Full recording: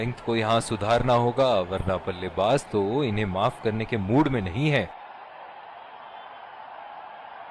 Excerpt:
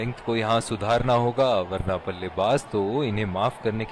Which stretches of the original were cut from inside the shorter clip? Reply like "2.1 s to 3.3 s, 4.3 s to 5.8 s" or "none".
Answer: none